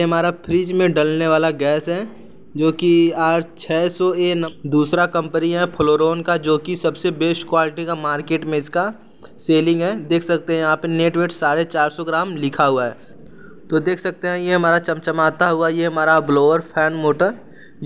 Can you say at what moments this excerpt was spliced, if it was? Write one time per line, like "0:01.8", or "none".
0:04.5
0:13.1